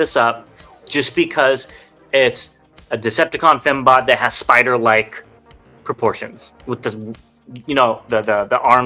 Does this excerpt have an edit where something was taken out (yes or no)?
no